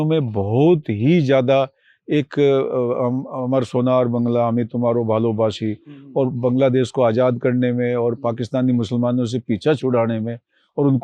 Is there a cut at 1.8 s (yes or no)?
no